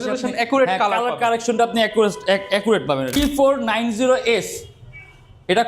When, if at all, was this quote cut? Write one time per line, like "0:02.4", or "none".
0:03.2